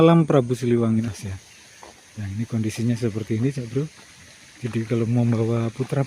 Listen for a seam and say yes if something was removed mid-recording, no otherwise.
yes